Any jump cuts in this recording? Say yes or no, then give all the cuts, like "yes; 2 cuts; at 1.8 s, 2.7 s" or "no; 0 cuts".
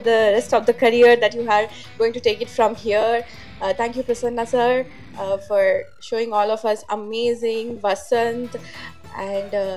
no; 0 cuts